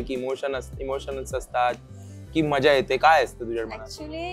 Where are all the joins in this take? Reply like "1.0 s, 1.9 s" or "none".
none